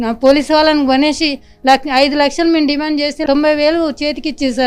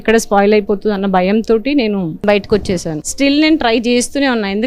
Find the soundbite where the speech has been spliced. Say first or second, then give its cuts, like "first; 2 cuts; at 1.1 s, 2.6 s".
second; 2 cuts; at 2.2 s, 3.0 s